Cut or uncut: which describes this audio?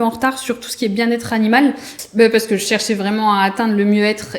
cut